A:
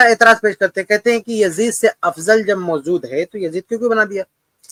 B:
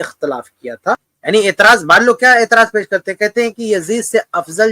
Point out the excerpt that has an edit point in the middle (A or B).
B